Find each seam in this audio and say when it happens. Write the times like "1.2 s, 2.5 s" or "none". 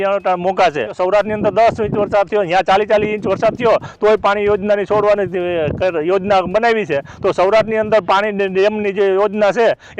0.9 s